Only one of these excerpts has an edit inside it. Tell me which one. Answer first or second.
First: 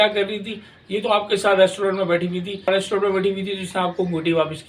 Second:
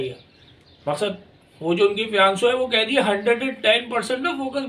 first